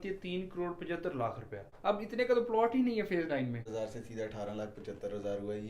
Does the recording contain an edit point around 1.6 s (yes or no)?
yes